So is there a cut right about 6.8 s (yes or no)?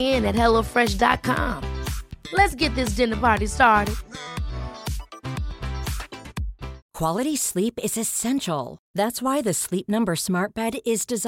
yes